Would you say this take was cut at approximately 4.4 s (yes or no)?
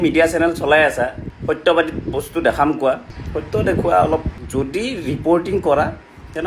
yes